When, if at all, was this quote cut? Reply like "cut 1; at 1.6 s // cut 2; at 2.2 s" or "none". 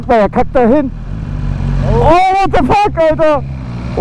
none